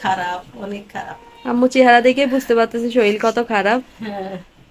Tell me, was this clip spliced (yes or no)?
no